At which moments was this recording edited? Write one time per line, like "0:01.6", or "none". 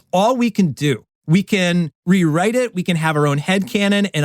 0:02.0